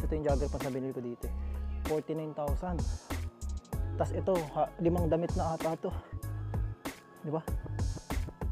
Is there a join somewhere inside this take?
no; 0 cuts

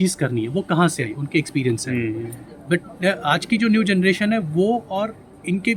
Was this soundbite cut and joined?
no; 0 cuts

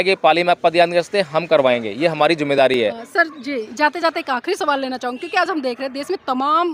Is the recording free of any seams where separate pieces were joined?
yes; 0 cuts

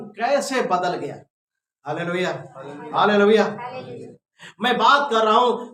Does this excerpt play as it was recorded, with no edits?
yes; 0 cuts

